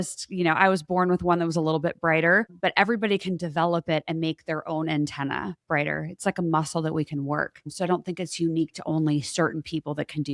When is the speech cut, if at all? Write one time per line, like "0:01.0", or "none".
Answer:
none